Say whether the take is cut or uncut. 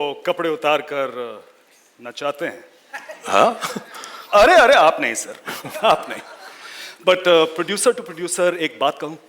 uncut